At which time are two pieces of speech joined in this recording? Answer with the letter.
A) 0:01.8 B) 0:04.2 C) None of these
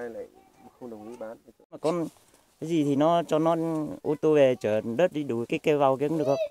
A